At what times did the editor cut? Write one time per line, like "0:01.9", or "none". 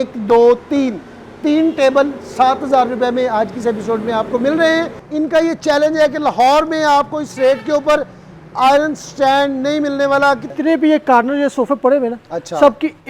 0:05.0
0:10.5